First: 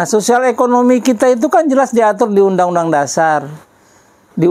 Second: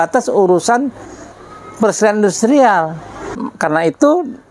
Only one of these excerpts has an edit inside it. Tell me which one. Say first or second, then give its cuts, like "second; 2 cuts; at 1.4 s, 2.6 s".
second; 1 cut; at 3.5 s